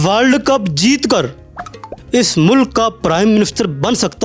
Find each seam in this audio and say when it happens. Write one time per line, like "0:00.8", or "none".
none